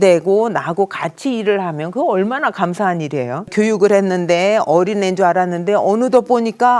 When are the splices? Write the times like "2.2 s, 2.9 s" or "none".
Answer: 3.5 s